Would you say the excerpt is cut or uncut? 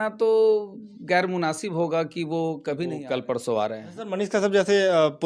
cut